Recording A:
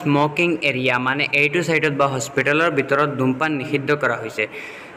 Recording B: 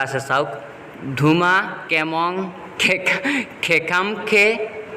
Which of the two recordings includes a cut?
B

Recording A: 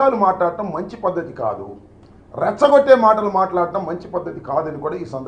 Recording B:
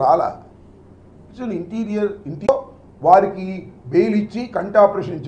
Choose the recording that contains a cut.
B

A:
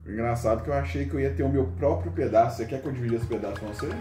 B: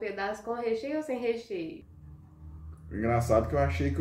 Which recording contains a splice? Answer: B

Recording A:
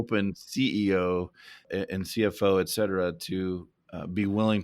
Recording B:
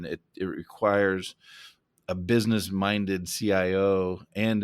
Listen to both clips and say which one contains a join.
A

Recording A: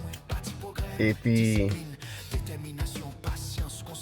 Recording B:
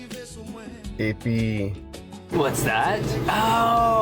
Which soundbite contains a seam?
B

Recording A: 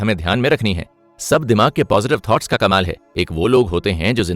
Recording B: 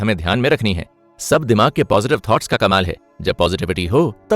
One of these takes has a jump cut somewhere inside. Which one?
A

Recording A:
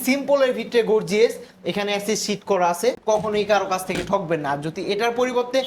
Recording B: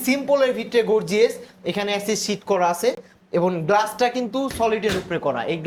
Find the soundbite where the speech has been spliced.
A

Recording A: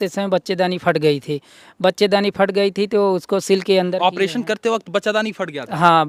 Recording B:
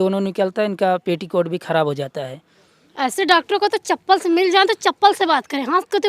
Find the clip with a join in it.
B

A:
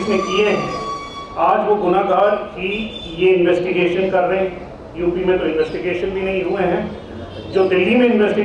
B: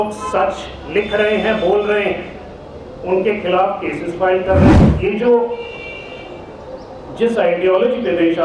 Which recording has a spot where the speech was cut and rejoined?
B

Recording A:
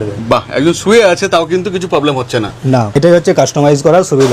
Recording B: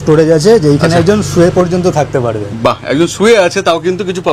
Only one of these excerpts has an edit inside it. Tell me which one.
A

